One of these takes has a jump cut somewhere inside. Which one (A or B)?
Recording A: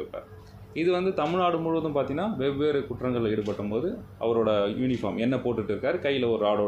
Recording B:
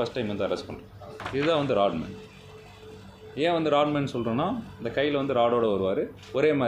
B